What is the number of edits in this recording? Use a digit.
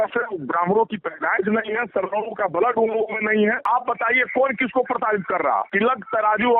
2